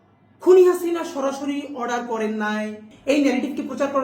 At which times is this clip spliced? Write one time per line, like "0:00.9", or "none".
0:02.9